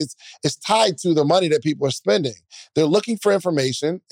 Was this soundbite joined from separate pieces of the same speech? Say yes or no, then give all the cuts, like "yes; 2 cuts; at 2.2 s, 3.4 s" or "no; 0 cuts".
yes; 1 cut; at 1.9 s